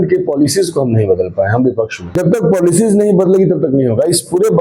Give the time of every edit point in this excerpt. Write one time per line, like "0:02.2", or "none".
0:02.0